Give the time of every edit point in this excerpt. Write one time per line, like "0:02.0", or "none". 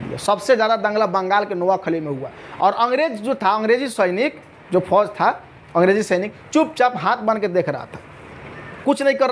none